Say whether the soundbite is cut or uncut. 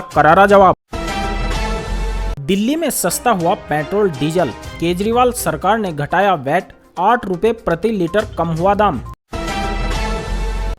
cut